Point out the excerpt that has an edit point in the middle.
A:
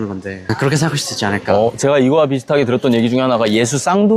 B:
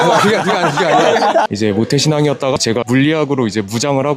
B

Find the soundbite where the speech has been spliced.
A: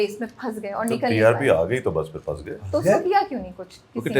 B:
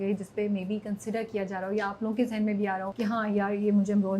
B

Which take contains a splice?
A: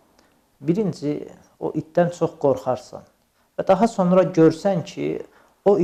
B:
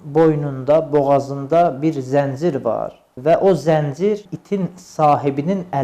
B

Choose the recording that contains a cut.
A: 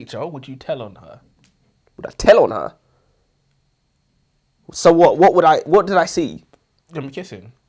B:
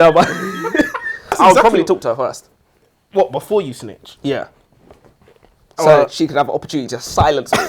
B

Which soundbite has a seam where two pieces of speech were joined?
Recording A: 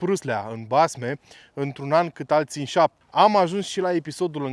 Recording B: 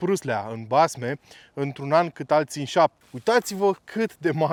A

